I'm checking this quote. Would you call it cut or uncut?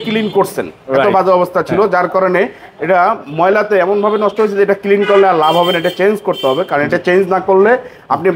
uncut